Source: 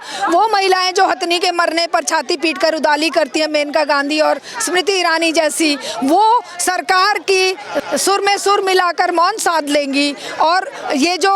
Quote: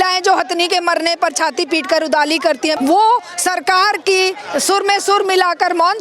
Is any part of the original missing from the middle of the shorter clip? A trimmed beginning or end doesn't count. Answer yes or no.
yes